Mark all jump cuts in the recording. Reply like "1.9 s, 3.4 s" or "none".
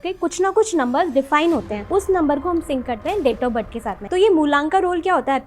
1.9 s, 3.9 s